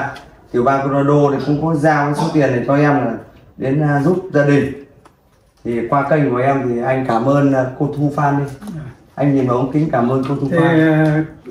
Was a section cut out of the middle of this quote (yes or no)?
no